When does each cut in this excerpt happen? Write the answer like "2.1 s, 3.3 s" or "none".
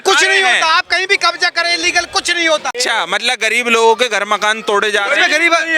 2.7 s